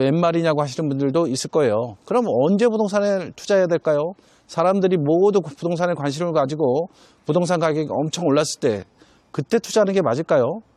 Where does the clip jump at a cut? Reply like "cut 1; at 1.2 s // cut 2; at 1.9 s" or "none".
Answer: none